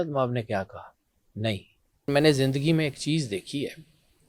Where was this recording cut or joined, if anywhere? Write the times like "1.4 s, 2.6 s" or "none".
2.1 s